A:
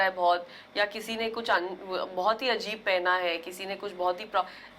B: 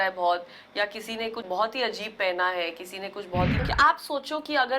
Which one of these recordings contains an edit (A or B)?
B